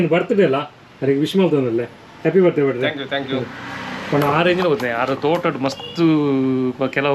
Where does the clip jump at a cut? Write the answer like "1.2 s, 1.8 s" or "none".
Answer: none

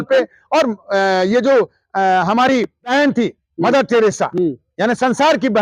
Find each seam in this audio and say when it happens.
2.9 s

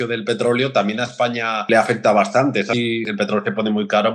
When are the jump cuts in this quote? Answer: 1.5 s, 2.8 s

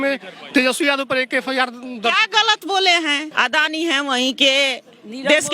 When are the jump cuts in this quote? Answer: 3.3 s

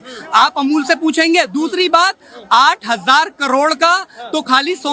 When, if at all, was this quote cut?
none

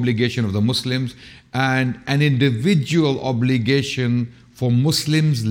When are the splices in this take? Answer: none

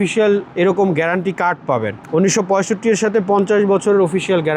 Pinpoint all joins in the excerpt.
none

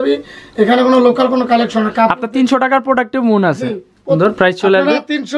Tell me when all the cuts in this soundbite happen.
4.2 s

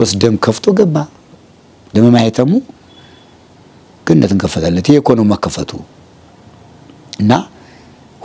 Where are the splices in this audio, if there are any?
none

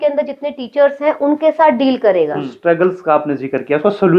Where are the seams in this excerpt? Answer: 2.5 s

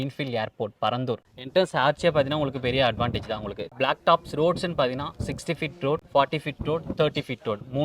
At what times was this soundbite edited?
1.3 s, 3.6 s, 6.1 s

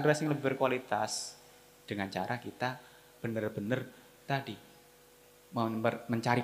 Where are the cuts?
none

